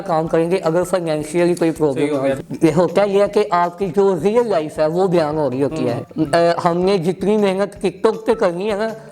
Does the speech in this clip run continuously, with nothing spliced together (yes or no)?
no